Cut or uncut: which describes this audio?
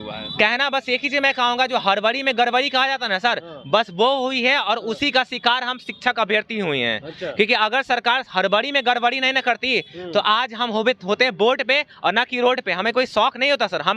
uncut